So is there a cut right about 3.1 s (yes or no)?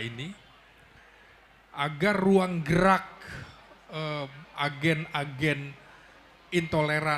no